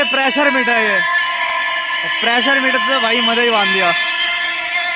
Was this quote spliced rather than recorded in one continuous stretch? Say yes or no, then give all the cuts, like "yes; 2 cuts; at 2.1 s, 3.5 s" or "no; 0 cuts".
no; 0 cuts